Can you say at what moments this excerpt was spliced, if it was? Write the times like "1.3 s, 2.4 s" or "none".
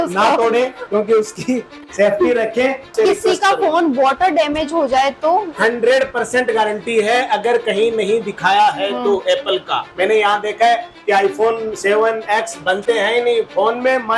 2.9 s, 9.8 s